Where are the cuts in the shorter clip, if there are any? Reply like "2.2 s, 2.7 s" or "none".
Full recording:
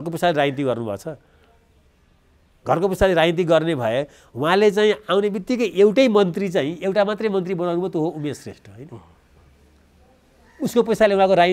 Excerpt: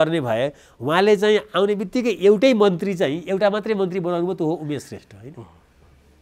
none